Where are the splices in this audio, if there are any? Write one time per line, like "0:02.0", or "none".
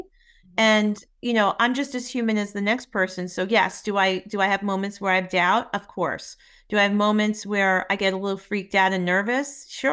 none